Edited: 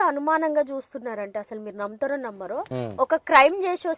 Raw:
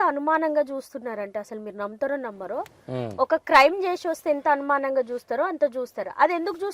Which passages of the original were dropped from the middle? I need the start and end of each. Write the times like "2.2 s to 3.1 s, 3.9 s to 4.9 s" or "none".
2.7 s to 2.9 s